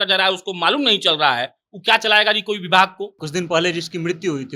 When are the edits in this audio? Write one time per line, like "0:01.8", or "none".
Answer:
0:03.2